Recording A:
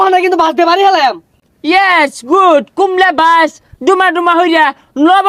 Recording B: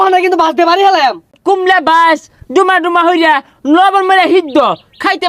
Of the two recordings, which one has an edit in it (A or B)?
B